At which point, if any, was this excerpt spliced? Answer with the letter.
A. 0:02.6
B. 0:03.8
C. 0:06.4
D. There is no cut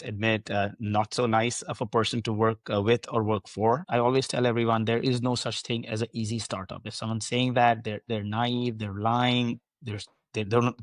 B